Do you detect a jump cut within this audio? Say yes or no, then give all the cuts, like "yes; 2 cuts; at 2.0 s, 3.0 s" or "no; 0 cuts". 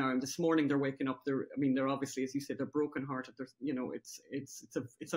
no; 0 cuts